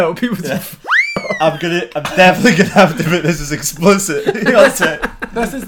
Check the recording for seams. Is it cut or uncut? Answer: uncut